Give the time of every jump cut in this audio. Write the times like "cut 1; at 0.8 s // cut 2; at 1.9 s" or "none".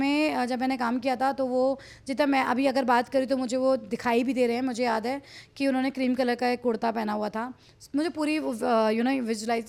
none